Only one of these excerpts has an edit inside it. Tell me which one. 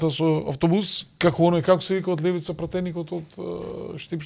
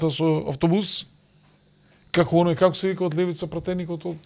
first; 1 cut; at 1.0 s

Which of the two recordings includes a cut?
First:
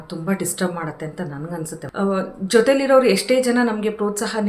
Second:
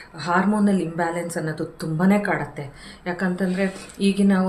first; 1 cut; at 1.8 s

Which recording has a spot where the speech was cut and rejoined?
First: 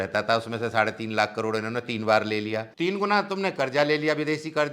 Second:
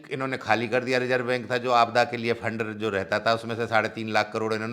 first; 1 cut; at 2.7 s

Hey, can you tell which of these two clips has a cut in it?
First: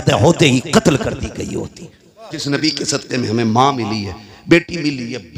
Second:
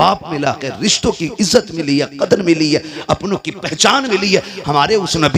first; 1 cut; at 2.4 s

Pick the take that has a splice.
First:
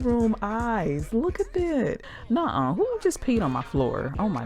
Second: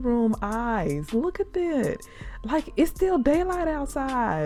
first; 1 cut; at 2.1 s

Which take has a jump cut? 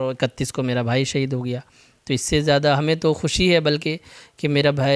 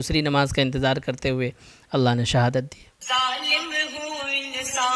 second; 1 cut; at 3.0 s

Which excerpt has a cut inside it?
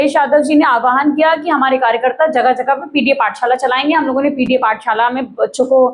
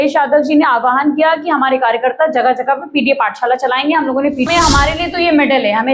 second; 1 cut; at 4.5 s

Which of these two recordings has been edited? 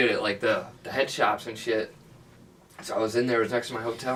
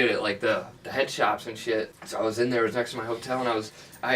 second; 1 cut; at 2.0 s

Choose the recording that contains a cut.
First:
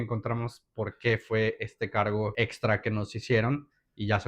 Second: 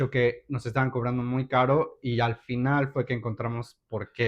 first; 1 cut; at 2.3 s

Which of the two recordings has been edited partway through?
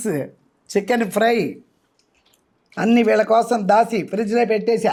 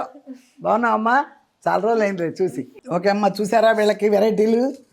second; 1 cut; at 2.7 s

